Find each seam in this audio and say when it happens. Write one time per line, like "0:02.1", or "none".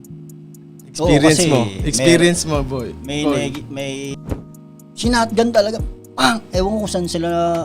0:01.0
0:04.2